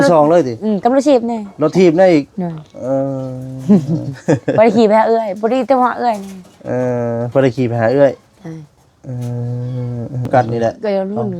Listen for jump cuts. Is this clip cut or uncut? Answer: cut